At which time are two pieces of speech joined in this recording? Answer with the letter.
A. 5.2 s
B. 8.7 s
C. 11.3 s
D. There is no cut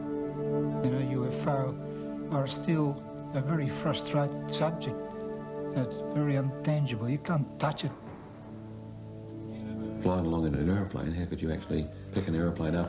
D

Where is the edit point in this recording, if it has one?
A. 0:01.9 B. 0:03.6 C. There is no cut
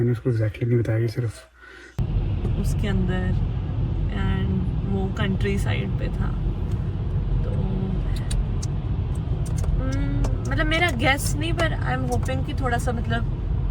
A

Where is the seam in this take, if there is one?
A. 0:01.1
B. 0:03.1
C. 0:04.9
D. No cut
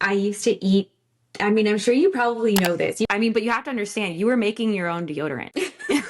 B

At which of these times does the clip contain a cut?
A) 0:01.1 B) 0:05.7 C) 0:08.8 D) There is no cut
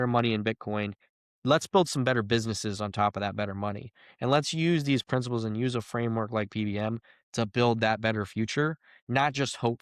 D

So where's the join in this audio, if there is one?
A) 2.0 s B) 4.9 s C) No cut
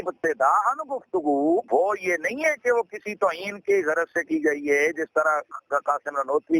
C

